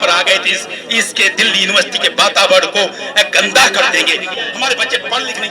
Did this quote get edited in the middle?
yes; 1 cut; at 4.4 s

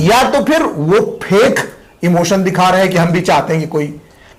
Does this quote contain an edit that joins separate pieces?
no; 0 cuts

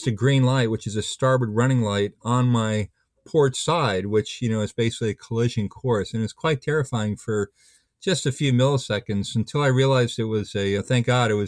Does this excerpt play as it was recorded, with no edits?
yes; 0 cuts

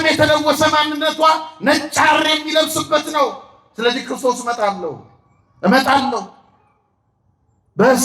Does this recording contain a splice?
no; 0 cuts

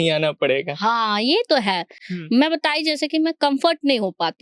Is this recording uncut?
yes; 0 cuts

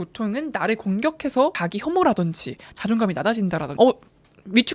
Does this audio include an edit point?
yes; 2 cuts; at 1.6 s, 3.7 s

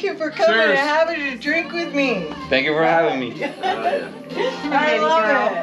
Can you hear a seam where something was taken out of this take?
no; 0 cuts

